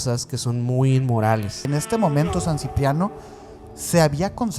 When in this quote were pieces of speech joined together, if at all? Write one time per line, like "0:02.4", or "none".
0:01.7